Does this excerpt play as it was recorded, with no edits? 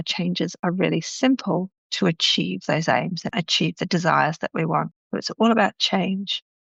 yes; 0 cuts

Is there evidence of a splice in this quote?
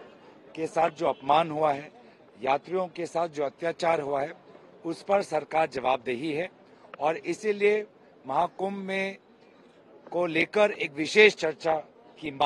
no; 0 cuts

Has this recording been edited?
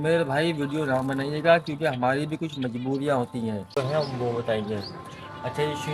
yes; 1 cut; at 3.7 s

